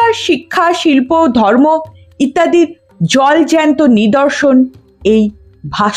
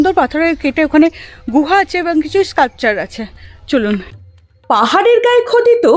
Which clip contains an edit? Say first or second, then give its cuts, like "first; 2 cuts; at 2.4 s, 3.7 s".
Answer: second; 1 cut; at 4.1 s